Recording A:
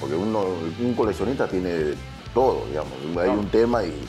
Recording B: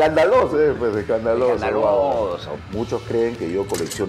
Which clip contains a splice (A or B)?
B